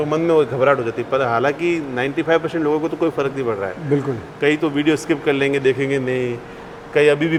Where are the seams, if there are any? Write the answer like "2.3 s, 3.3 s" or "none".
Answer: none